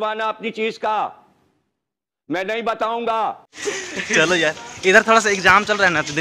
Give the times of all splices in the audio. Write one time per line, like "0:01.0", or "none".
0:03.5

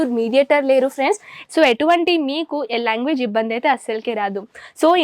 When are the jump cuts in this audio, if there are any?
0:01.3

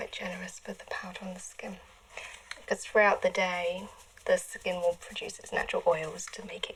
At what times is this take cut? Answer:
none

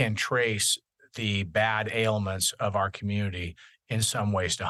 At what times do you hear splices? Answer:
none

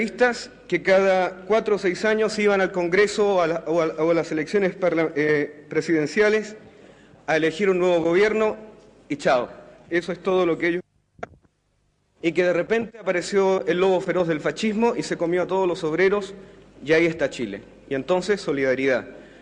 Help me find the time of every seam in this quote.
0:15.0

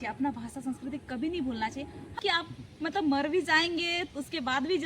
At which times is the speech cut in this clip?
0:02.1

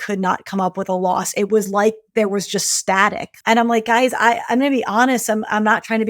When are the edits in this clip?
0:03.3

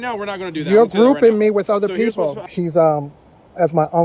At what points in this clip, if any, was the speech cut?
0:02.4

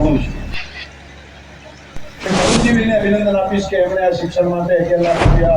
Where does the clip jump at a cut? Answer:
0:02.3

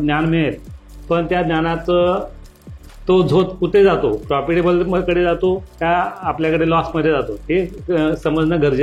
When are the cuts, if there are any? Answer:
none

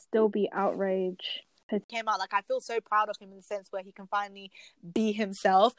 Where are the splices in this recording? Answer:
0:01.8

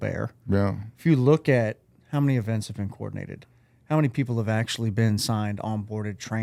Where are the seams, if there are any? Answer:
none

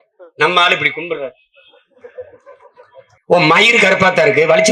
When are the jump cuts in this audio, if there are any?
0:03.1

